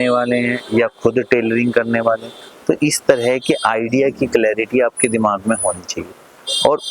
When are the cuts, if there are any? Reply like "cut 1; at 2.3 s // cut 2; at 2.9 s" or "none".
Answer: none